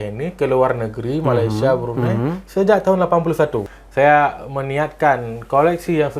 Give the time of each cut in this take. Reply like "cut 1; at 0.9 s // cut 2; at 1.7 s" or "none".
cut 1; at 3.8 s